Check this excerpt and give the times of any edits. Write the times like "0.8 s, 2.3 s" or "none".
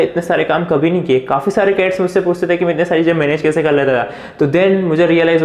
none

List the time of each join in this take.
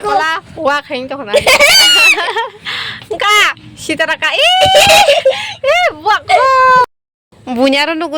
6.9 s

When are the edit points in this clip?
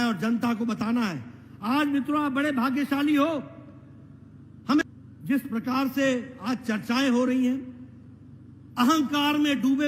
4.8 s

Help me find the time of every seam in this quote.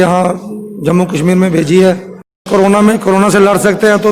2.5 s

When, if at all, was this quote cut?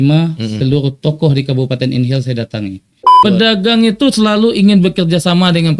3.2 s

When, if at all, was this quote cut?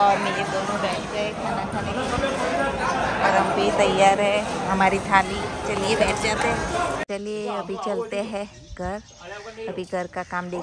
7.0 s

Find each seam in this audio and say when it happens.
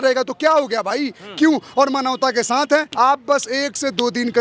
2.9 s

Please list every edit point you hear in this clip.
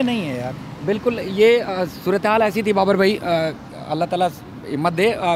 none

